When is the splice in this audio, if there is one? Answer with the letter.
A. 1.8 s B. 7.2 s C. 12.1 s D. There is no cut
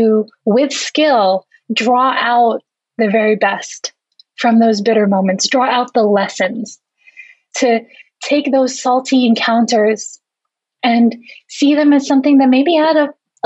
D